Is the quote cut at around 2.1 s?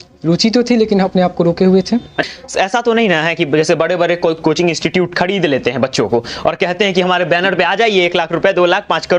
yes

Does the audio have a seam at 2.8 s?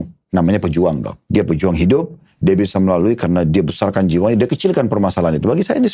no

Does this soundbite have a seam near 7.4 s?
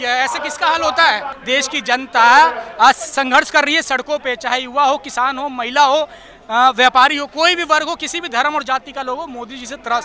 no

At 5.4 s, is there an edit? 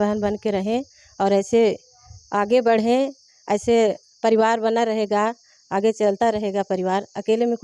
no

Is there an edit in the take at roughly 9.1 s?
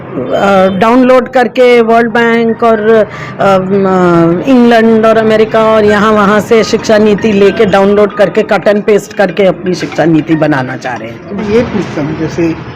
no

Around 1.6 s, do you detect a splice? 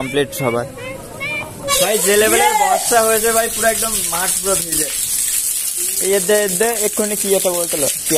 yes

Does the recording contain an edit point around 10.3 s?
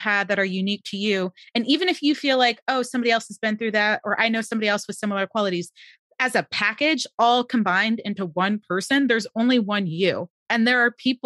yes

